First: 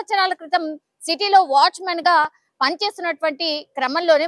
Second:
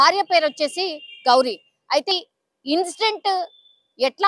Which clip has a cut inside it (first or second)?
second